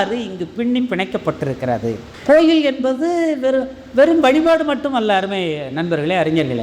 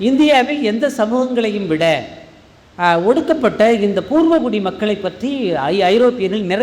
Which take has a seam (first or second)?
first